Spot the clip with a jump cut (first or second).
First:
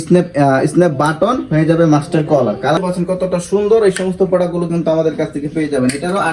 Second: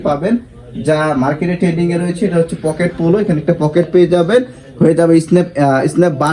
first